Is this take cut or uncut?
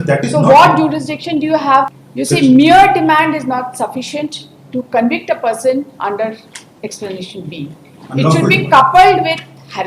cut